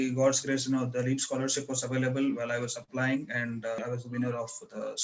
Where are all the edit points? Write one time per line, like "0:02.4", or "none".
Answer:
0:03.8